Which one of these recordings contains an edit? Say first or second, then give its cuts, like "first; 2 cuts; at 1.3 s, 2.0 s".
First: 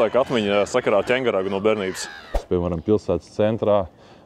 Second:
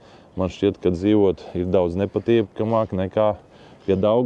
first; 1 cut; at 2.4 s